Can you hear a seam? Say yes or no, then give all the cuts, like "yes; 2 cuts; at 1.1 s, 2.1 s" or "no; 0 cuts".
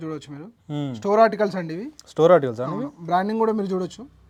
no; 0 cuts